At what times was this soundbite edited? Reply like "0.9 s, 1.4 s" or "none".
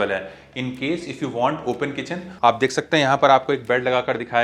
2.2 s